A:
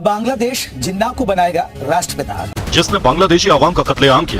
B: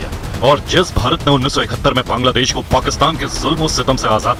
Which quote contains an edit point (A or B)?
A